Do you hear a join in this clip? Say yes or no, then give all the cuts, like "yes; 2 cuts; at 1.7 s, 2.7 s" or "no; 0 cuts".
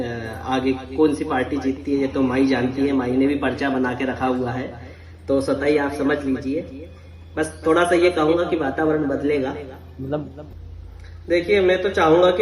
yes; 1 cut; at 10.4 s